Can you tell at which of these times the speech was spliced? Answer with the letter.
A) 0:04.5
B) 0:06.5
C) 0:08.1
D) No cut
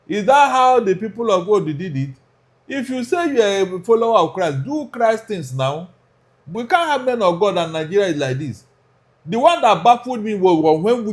B